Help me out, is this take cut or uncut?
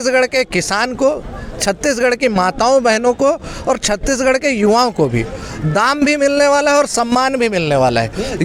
uncut